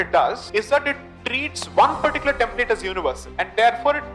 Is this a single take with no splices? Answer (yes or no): yes